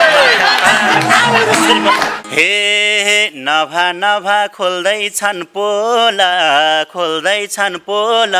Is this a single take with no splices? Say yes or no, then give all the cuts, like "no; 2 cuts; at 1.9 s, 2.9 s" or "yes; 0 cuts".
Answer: no; 1 cut; at 2.2 s